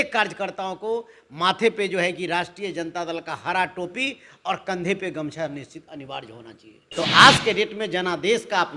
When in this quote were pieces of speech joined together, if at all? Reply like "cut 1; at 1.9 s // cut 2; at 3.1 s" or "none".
cut 1; at 6.9 s